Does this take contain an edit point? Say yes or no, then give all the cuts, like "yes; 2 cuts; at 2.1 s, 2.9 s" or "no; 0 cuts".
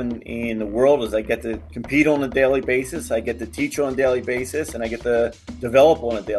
no; 0 cuts